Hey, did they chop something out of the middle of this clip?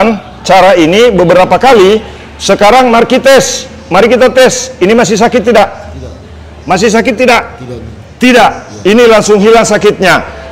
no; 0 cuts

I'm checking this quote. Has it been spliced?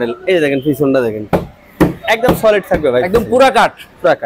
no; 0 cuts

